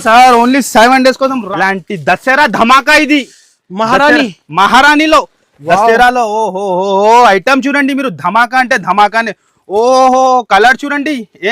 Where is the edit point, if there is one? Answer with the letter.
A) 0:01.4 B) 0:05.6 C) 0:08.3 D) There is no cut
A